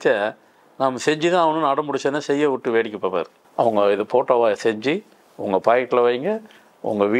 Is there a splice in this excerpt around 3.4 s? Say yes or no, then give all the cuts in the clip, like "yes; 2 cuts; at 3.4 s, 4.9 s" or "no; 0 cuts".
yes; 1 cut; at 3.4 s